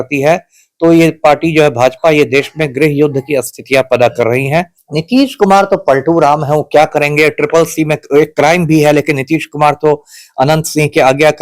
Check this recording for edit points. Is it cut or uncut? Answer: cut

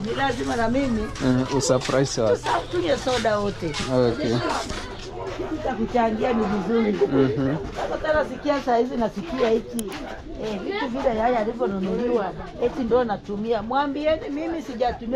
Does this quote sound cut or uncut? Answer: uncut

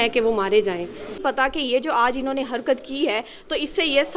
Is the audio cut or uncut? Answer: cut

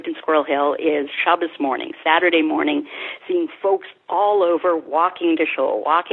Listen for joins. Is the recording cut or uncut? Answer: uncut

